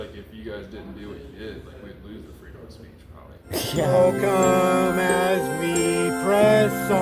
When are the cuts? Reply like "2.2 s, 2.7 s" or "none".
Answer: 3.8 s